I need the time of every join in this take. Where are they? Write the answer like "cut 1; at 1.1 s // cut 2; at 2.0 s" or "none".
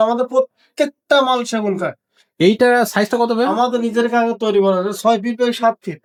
none